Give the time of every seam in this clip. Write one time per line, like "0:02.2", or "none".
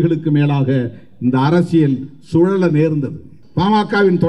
0:03.4